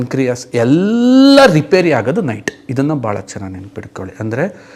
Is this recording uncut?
yes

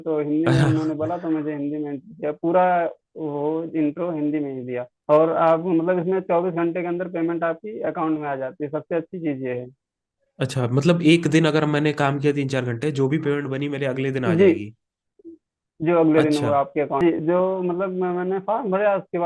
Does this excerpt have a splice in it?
yes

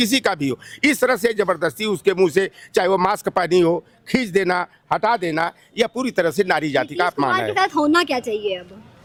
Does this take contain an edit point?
no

